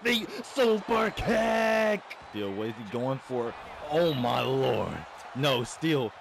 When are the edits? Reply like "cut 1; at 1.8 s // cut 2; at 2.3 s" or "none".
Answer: cut 1; at 2.2 s

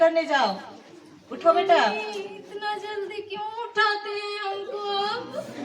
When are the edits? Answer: none

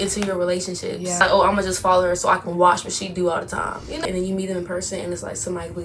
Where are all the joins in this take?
cut 1; at 1.2 s // cut 2; at 4.0 s

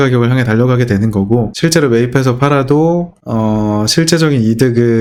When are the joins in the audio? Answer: none

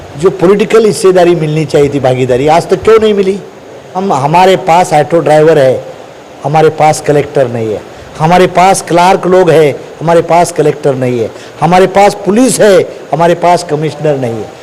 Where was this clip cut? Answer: cut 1; at 4.0 s

